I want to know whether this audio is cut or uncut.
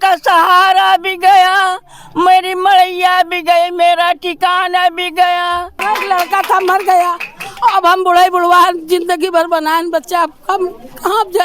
cut